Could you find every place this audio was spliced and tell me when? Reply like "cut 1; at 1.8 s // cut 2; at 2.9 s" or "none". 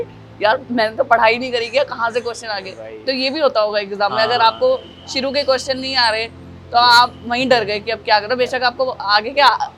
none